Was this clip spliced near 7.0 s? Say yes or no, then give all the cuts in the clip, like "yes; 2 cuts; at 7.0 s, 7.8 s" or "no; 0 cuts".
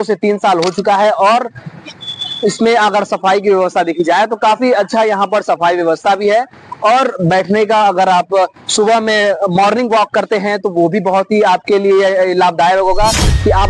no; 0 cuts